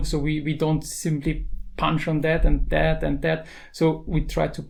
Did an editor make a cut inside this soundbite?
no; 0 cuts

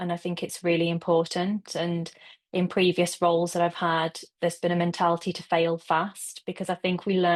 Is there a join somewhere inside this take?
no; 0 cuts

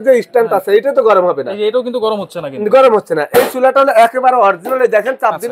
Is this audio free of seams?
yes; 0 cuts

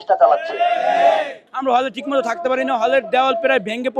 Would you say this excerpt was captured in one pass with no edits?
no; 1 cut; at 1.5 s

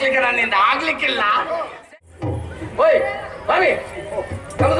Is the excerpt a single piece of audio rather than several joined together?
no; 1 cut; at 1.9 s

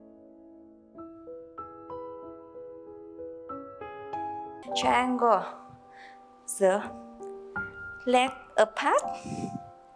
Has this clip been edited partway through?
no; 0 cuts

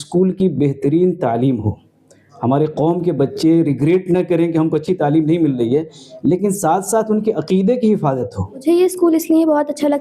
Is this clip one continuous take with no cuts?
no; 1 cut; at 8.6 s

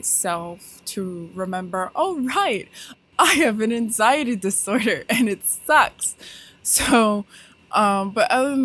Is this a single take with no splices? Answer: yes; 0 cuts

